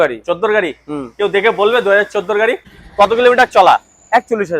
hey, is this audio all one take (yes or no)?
no